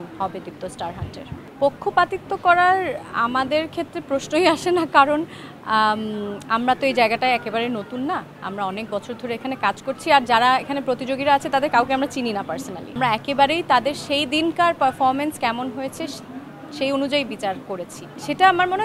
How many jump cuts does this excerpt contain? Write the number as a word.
zero